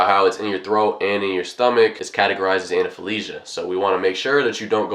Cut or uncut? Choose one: cut